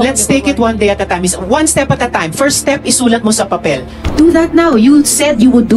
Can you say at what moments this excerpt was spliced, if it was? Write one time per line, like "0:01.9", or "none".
0:04.0